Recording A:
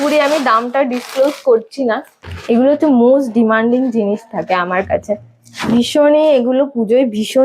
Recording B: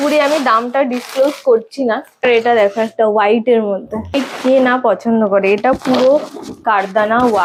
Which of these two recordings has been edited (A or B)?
A